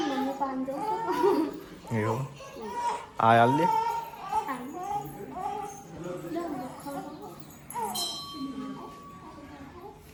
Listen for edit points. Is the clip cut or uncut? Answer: uncut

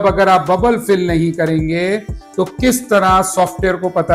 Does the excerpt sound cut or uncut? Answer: uncut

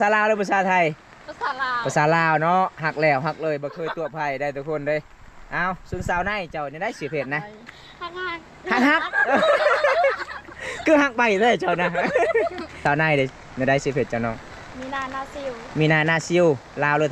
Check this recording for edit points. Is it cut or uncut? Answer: cut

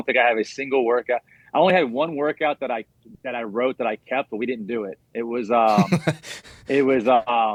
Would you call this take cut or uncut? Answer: uncut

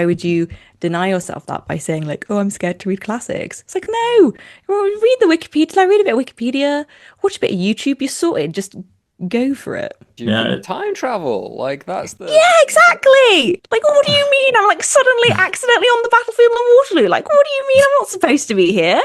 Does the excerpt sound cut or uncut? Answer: uncut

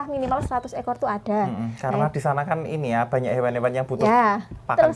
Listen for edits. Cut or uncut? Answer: uncut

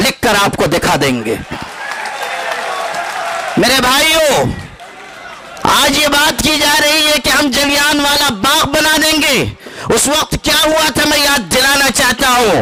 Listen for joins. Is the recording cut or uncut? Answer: uncut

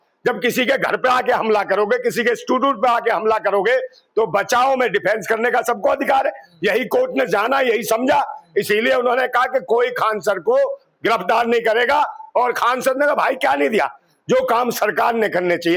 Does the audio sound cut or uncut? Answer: uncut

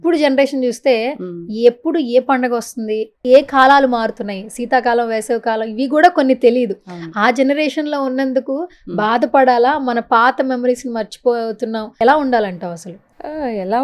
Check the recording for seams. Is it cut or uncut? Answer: uncut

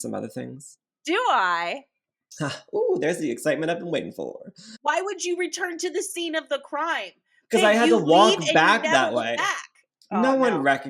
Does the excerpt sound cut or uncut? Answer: cut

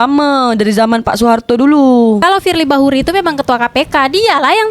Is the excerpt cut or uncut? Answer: cut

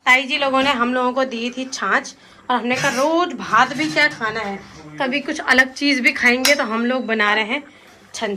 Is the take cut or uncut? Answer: uncut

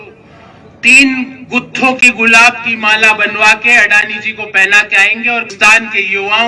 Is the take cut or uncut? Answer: cut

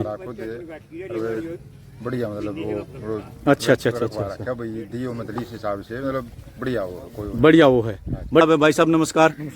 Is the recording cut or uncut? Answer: cut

